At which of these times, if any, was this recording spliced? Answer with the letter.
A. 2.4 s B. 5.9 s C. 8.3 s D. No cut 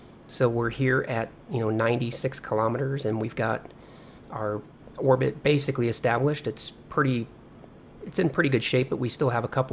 A